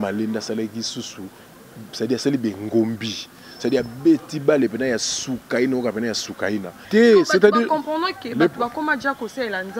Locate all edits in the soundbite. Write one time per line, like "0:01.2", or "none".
0:06.8